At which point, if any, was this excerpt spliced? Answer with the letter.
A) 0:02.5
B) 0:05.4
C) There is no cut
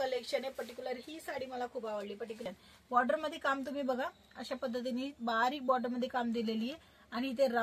A